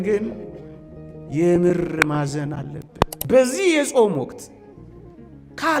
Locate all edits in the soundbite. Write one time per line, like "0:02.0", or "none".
0:03.3